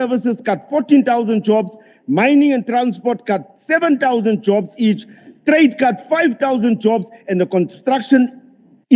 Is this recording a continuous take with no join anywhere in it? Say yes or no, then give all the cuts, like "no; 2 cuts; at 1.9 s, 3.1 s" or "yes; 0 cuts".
yes; 0 cuts